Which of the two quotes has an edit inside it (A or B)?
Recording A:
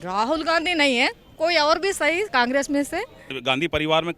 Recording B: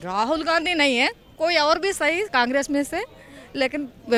A